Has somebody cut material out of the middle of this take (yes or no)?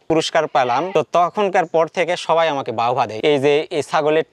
yes